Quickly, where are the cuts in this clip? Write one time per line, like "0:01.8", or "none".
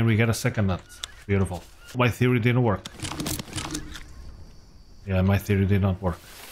0:01.9